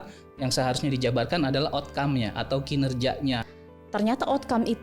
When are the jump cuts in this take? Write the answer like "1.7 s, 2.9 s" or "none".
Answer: 3.5 s